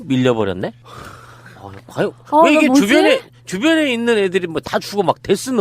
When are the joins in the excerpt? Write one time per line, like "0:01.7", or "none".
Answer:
0:02.9